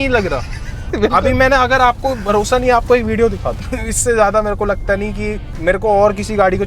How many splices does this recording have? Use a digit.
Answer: 2